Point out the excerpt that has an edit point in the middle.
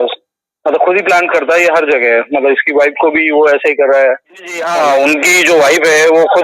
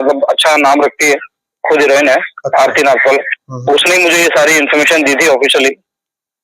first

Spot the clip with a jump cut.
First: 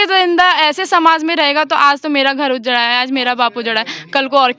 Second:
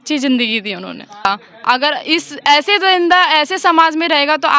second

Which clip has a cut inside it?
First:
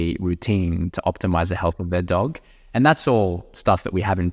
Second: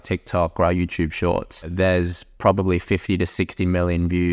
second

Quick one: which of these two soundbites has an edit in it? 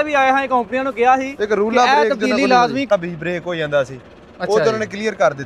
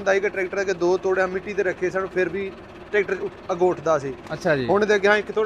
first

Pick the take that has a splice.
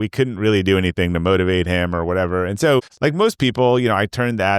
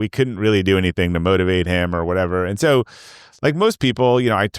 first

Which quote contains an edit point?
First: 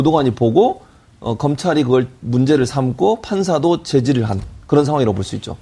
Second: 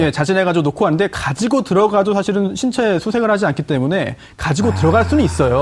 second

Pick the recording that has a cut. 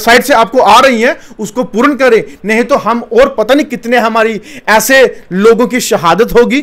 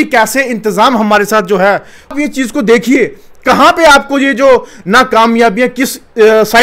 second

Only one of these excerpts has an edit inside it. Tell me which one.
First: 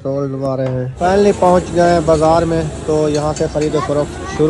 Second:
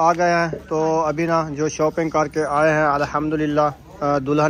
first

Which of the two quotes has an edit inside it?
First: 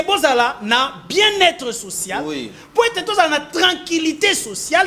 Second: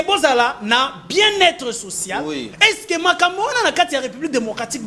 second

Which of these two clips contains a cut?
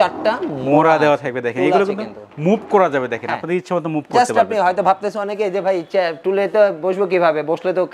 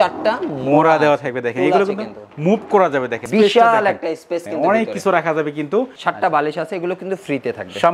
second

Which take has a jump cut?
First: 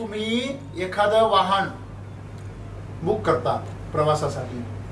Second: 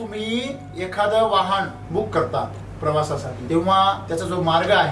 second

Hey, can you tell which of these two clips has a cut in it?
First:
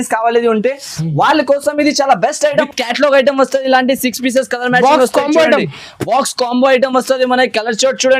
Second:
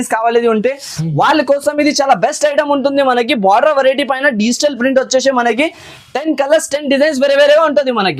first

